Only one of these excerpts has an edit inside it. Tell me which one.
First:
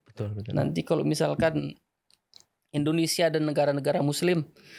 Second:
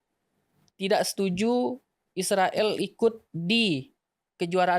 second; 1 cut; at 3.3 s

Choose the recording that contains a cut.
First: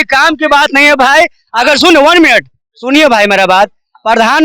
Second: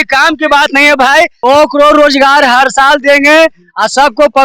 second; 1 cut; at 1.4 s

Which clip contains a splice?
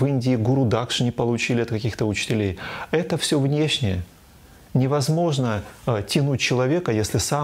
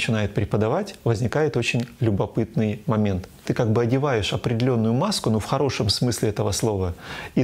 second; 1 cut; at 3.4 s

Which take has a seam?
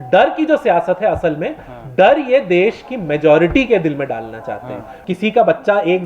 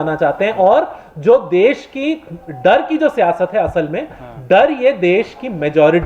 first; 1 cut; at 5.0 s

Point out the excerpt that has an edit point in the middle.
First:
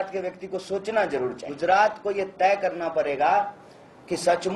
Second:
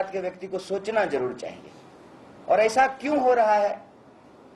first; 1 cut; at 1.5 s

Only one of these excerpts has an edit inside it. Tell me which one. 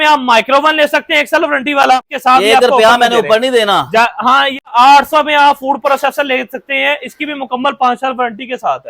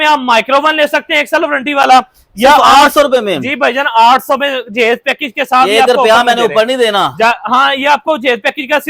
first; 2 cuts; at 2.1 s, 4.7 s

